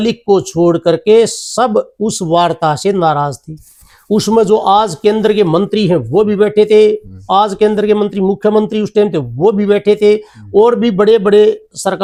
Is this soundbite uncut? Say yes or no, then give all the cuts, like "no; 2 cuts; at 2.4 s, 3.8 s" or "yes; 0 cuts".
yes; 0 cuts